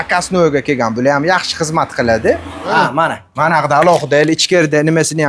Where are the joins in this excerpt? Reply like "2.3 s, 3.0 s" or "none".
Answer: 2.7 s